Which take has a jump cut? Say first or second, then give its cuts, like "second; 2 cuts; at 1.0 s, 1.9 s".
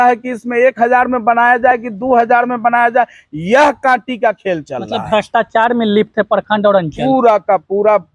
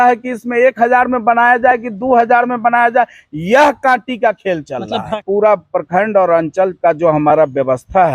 second; 1 cut; at 5.2 s